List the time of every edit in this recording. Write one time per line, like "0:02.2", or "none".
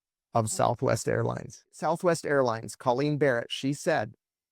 0:01.8